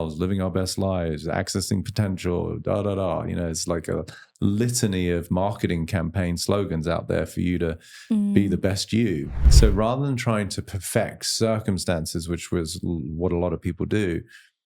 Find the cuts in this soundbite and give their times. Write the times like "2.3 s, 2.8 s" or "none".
9.5 s